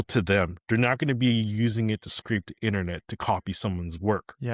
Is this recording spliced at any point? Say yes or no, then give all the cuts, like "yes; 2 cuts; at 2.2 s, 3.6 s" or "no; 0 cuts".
no; 0 cuts